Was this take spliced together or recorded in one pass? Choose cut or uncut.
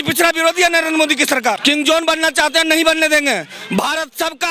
cut